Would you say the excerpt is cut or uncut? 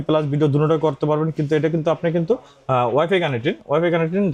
uncut